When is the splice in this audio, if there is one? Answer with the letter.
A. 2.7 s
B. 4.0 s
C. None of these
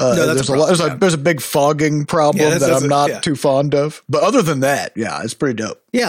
B